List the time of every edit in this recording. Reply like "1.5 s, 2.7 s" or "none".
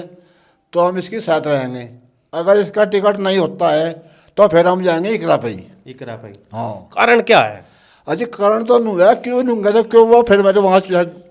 none